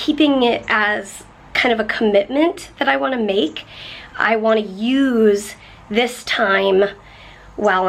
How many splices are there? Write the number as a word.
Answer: zero